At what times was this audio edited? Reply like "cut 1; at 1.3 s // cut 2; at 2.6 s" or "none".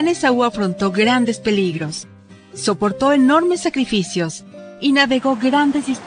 none